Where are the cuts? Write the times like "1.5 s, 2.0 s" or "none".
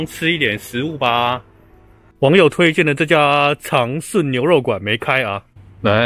none